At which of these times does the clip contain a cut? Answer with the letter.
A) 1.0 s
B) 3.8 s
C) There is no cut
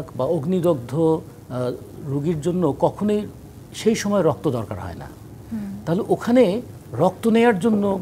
C